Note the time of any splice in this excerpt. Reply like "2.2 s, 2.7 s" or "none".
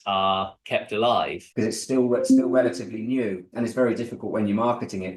1.4 s